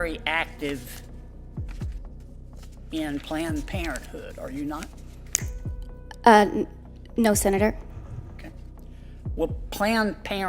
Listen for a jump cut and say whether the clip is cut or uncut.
cut